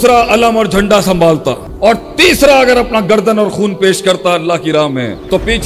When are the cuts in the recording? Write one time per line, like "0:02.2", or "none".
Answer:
0:01.7